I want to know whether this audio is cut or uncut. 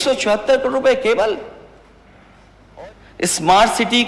cut